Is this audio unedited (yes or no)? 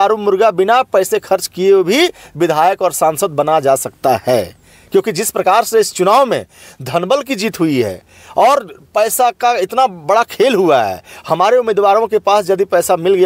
yes